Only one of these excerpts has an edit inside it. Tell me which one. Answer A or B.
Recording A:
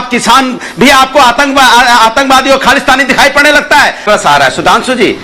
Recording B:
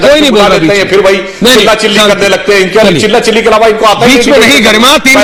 A